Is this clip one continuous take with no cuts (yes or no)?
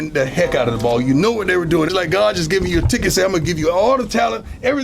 no